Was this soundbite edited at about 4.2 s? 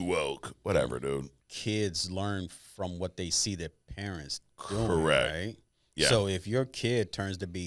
no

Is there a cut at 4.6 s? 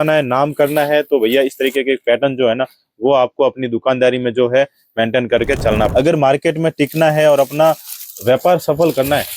no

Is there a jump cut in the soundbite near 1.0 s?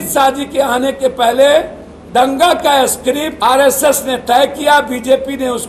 no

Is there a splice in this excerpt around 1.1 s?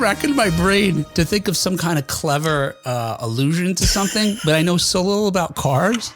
yes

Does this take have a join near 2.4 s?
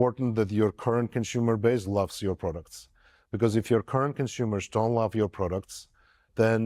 no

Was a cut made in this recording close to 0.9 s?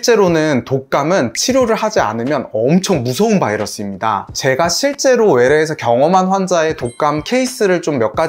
no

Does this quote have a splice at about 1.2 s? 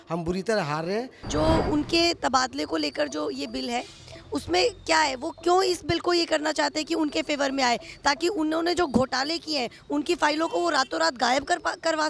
yes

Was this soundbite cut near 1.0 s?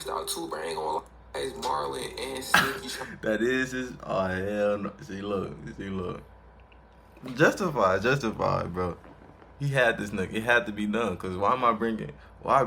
yes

